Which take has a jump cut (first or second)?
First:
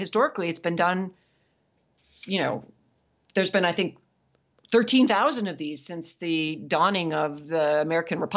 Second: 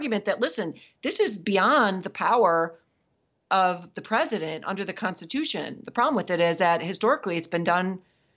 second